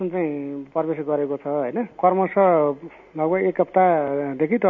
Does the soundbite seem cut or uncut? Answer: uncut